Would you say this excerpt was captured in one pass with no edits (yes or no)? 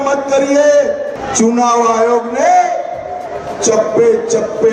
no